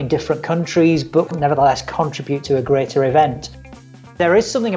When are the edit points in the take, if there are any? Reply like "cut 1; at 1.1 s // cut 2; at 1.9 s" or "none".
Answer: cut 1; at 1.3 s // cut 2; at 2.4 s // cut 3; at 4.0 s